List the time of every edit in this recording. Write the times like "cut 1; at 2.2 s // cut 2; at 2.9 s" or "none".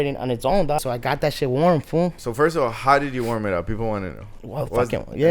cut 1; at 0.8 s // cut 2; at 2.2 s